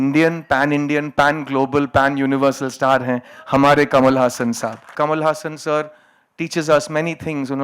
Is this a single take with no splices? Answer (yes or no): no